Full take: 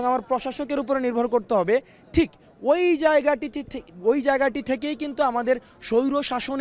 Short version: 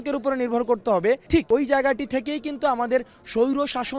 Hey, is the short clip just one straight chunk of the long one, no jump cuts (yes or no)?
no